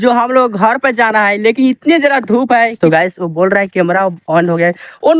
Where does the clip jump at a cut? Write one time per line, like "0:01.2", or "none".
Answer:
0:02.7

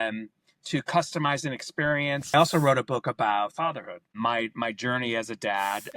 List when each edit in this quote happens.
0:02.3

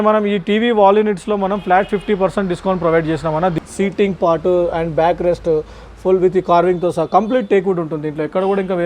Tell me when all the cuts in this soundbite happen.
0:03.5

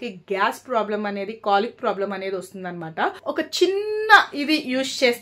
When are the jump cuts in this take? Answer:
0:03.2

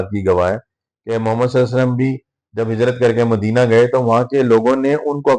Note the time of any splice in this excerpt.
none

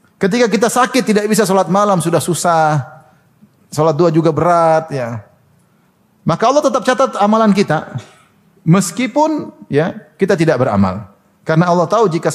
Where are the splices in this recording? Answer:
none

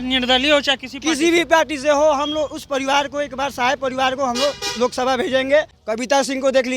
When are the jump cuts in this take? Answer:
0:05.8

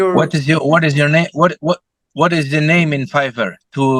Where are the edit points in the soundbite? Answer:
none

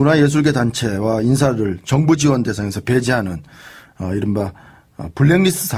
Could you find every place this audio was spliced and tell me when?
none

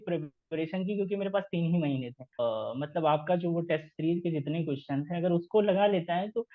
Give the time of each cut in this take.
0:02.2

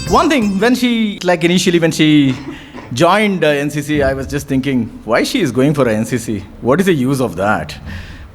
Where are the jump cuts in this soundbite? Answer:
0:01.1

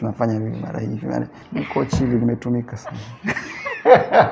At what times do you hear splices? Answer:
0:01.4

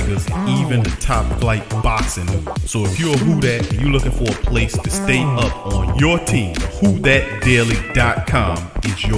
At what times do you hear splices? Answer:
none

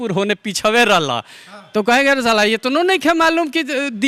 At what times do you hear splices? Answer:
none

